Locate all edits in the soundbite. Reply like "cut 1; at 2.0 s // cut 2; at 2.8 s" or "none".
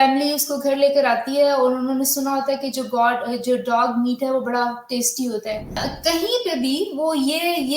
cut 1; at 5.9 s